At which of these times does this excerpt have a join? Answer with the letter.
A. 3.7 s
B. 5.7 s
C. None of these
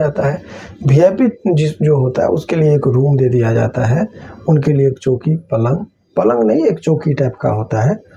C